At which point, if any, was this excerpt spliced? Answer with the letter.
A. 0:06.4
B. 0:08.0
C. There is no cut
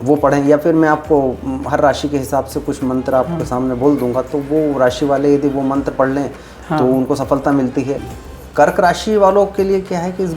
B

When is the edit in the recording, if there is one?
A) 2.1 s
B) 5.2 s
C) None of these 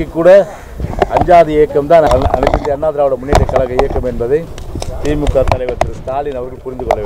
A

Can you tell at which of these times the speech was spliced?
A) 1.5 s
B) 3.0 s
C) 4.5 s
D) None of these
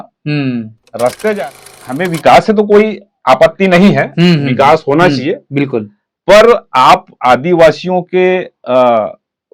A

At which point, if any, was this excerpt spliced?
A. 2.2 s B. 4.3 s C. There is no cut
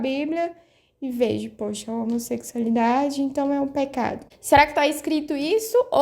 B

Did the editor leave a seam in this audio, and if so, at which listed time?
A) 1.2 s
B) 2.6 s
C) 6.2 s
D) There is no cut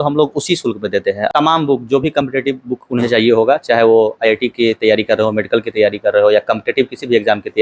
A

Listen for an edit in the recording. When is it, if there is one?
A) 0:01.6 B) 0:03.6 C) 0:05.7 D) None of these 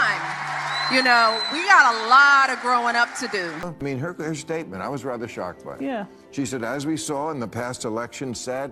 B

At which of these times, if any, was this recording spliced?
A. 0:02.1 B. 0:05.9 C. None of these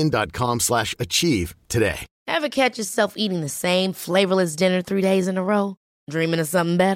A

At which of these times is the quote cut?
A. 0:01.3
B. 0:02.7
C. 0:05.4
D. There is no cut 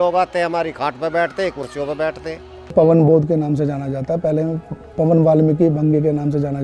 B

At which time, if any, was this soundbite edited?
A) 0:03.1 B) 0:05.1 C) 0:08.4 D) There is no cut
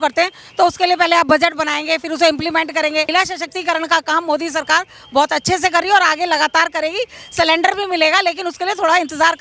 A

